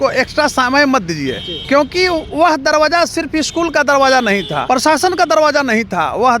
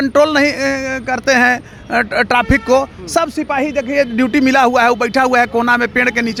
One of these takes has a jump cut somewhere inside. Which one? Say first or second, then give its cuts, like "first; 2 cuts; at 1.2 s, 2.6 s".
first; 2 cuts; at 1.5 s, 4.6 s